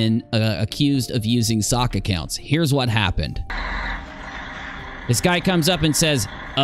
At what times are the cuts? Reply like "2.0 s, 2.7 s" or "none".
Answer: 3.5 s